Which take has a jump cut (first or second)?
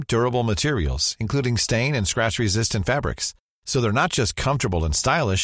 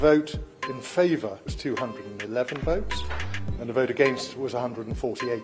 second